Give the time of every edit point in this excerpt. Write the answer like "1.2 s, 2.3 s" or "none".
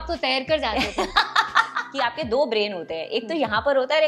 1.8 s